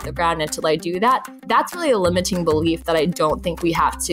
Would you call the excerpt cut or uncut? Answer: uncut